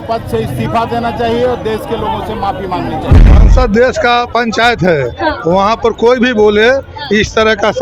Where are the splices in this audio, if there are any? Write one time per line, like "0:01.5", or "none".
0:03.3